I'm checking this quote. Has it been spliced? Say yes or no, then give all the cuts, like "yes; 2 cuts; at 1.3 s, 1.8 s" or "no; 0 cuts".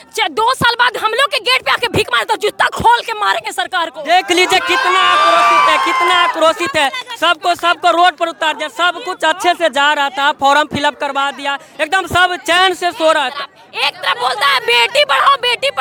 no; 0 cuts